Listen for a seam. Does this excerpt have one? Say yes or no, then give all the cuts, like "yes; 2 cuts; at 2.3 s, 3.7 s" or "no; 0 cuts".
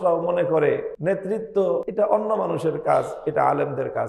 yes; 2 cuts; at 0.9 s, 1.9 s